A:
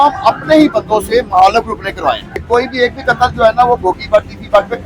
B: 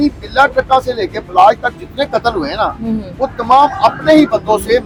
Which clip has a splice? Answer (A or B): A